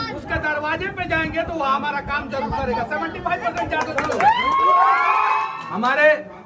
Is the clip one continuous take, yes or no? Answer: no